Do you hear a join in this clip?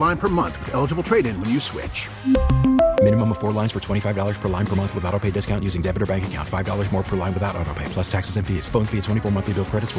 no; 0 cuts

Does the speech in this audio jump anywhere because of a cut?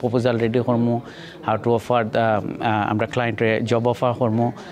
no; 0 cuts

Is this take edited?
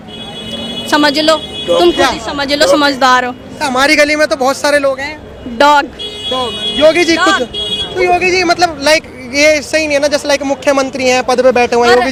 no; 0 cuts

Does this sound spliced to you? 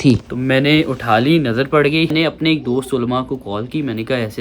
yes; 1 cut; at 2.1 s

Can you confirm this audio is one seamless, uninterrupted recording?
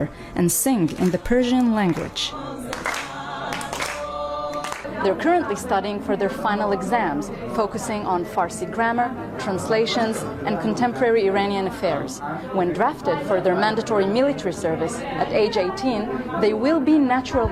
yes; 0 cuts

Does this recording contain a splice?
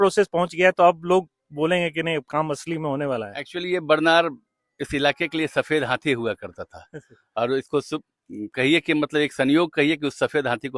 no; 0 cuts

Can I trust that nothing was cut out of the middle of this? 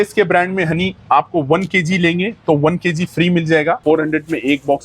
no; 1 cut; at 3.8 s

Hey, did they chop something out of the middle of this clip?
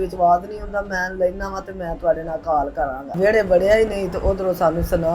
yes; 1 cut; at 3.1 s

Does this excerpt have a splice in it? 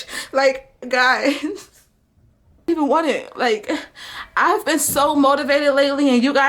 yes; 1 cut; at 2.7 s

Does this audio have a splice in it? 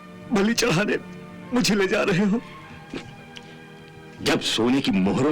no; 0 cuts

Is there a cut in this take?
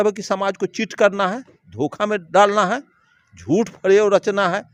no; 0 cuts

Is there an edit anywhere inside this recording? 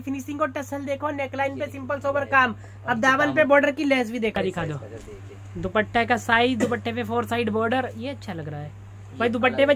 yes; 1 cut; at 4.4 s

